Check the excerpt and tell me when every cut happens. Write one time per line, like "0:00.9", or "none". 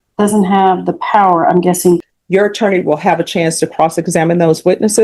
0:02.1